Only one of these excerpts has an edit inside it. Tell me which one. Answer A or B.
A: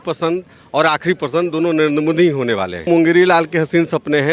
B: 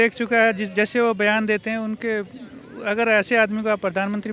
A